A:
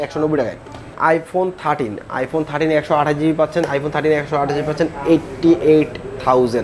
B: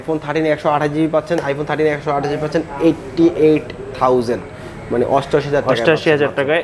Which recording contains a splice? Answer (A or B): A